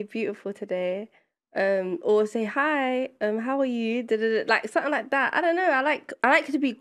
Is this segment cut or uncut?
uncut